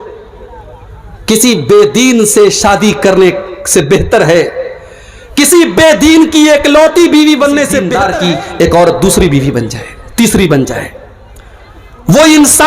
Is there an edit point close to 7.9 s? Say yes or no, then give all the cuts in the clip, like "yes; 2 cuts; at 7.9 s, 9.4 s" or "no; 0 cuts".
yes; 1 cut; at 7.9 s